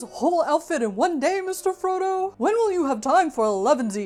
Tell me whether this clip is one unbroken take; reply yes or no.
yes